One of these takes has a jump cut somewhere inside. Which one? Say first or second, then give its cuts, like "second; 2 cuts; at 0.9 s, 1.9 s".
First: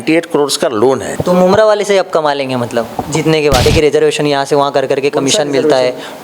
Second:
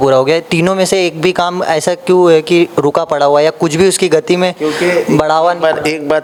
first; 2 cuts; at 1.1 s, 3.6 s